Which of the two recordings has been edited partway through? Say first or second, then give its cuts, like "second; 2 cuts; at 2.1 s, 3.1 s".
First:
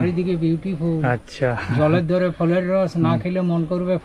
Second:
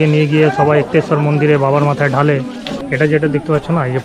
second; 1 cut; at 2.7 s